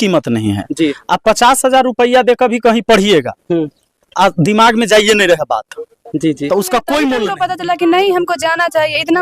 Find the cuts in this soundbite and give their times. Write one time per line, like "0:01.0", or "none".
0:07.3